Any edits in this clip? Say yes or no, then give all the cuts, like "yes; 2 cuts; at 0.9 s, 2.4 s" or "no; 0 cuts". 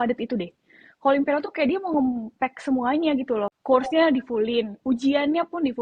yes; 1 cut; at 3.5 s